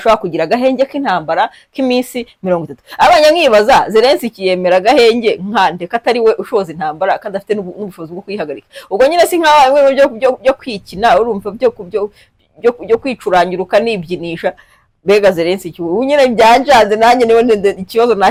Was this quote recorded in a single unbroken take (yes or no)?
yes